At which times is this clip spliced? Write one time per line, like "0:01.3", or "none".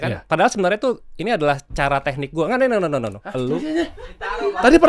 0:03.2